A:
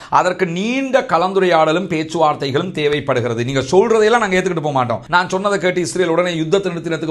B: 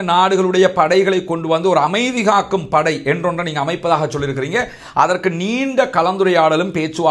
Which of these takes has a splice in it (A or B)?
A